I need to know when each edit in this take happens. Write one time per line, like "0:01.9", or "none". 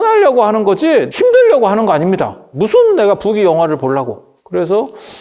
0:01.1
0:02.4
0:04.3